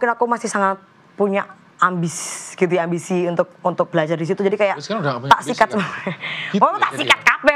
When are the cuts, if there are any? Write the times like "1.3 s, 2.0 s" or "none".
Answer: none